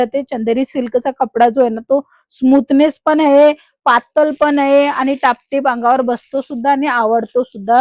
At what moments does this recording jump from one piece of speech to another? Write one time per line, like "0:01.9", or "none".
none